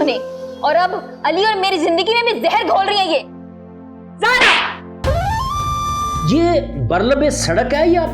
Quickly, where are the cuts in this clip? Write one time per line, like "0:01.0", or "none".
0:06.1